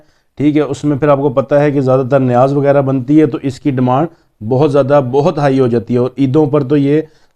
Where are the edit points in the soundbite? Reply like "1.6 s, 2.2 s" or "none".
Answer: none